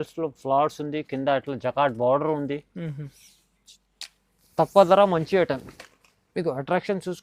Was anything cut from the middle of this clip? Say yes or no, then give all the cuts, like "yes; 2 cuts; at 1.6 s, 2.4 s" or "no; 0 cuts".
no; 0 cuts